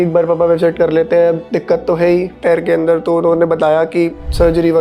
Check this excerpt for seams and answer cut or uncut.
uncut